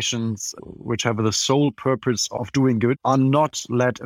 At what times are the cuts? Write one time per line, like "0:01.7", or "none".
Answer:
0:00.9
0:03.0